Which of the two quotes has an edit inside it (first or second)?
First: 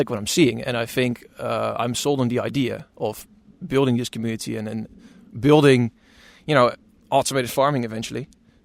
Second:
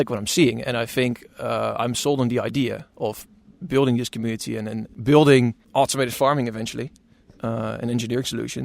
second